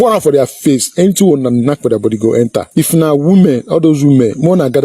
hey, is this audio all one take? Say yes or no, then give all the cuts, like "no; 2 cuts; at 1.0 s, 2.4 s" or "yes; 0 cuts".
no; 1 cut; at 2.7 s